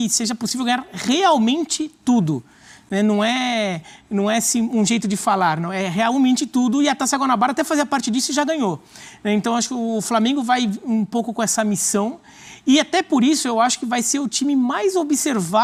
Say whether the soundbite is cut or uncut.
uncut